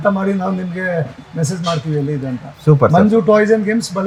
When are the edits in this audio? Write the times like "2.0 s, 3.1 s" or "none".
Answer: none

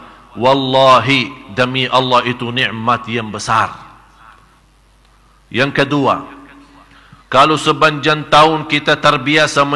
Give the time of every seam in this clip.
4.6 s

